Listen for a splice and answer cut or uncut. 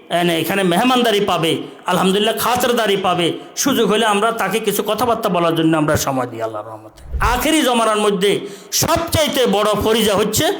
cut